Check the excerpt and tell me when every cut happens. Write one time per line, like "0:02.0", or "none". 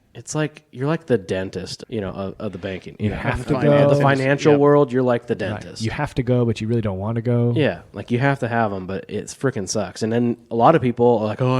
0:01.8